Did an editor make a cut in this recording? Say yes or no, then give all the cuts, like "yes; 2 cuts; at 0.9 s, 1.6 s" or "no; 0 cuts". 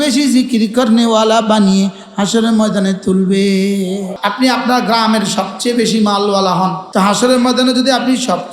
yes; 2 cuts; at 4.1 s, 6.8 s